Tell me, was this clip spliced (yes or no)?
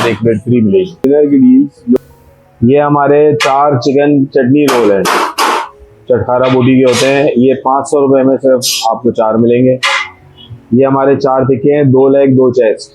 yes